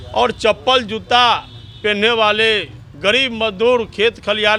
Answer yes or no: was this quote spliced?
no